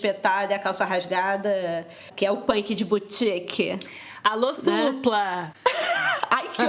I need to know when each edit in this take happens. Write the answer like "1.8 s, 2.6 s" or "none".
2.1 s, 5.5 s